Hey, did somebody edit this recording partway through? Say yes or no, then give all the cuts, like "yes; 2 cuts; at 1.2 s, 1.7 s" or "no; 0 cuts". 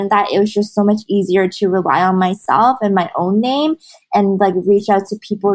no; 0 cuts